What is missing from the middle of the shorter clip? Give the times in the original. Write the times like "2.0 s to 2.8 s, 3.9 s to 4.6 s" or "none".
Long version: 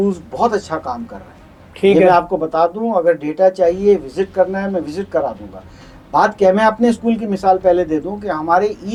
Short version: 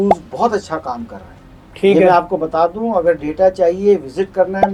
none